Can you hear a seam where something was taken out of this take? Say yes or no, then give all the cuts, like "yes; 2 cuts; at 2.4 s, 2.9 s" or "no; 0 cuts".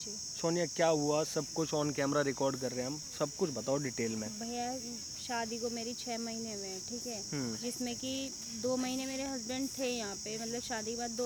no; 0 cuts